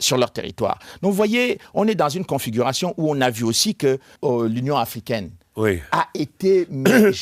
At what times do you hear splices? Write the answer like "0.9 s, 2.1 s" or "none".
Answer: 4.1 s